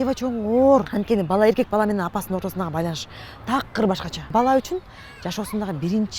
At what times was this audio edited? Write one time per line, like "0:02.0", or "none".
0:00.9
0:04.3